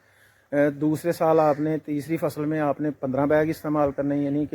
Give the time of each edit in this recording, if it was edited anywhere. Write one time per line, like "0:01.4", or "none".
none